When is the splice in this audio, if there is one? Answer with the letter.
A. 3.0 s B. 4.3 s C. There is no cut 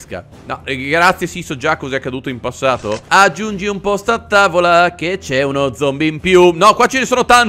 A